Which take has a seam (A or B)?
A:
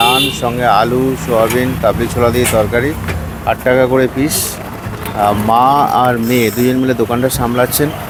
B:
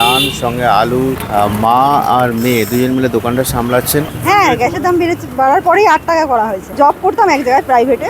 B